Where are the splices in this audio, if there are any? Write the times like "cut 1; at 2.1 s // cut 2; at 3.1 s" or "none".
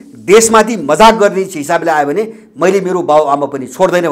none